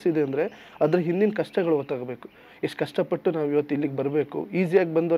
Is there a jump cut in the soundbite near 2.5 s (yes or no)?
no